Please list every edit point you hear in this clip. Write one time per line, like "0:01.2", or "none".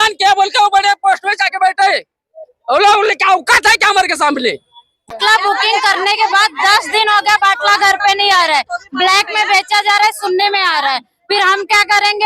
0:05.1